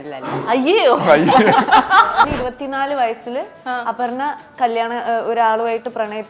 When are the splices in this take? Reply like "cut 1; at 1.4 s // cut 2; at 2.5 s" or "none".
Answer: cut 1; at 2.3 s